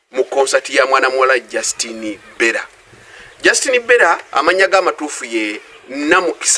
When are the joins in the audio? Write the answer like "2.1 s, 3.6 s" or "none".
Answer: 4.3 s